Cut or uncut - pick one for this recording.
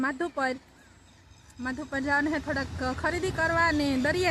uncut